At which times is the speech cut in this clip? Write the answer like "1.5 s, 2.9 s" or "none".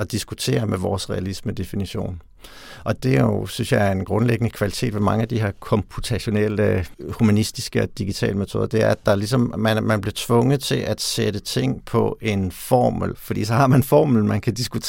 3.0 s, 7.0 s, 13.1 s